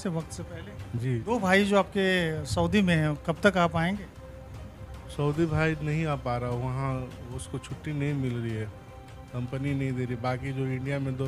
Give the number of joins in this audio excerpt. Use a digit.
1